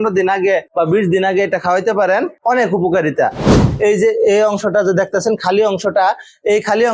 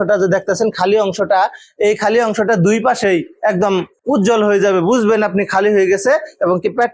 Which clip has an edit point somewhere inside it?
first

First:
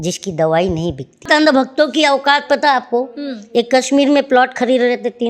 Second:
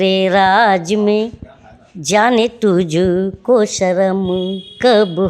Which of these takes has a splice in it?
first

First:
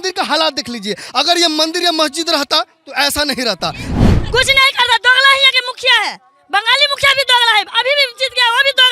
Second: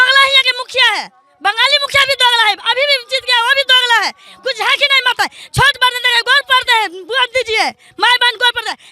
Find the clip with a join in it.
first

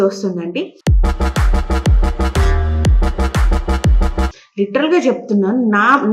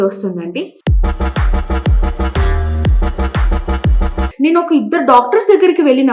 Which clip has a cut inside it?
second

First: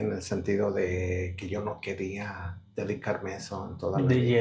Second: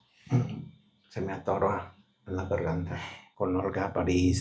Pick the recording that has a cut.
second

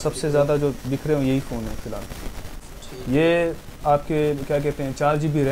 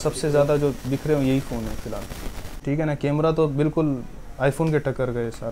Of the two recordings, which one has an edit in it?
second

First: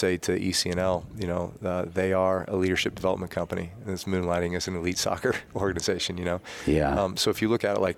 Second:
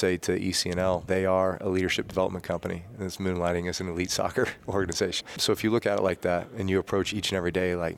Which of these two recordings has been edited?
second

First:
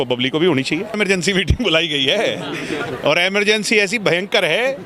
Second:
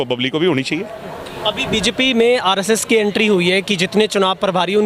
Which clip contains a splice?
first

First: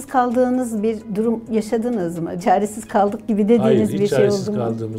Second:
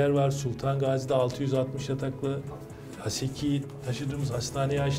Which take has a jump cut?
first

